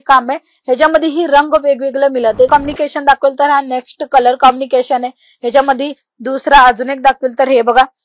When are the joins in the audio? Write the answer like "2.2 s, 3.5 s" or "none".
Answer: 2.5 s